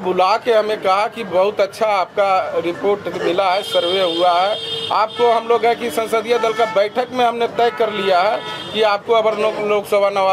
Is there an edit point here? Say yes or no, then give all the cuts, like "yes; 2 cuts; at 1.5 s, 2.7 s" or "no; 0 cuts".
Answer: no; 0 cuts